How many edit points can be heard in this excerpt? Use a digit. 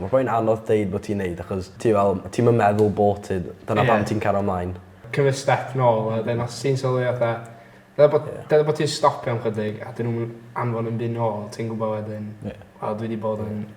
2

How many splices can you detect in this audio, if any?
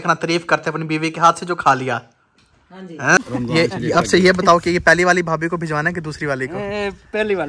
1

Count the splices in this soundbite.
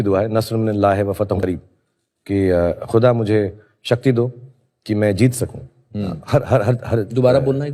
1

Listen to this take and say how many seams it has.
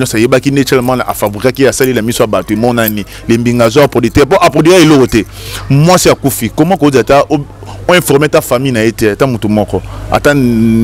0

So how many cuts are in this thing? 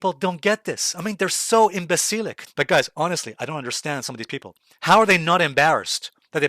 1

